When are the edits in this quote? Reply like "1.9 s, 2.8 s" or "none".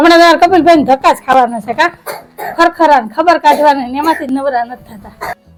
none